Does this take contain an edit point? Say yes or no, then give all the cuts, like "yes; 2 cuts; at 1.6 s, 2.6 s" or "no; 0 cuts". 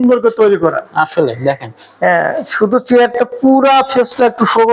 no; 0 cuts